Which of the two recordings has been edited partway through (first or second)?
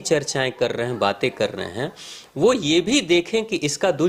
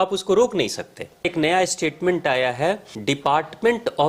second